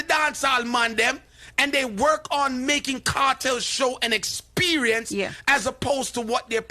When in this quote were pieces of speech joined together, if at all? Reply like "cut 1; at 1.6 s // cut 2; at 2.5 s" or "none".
none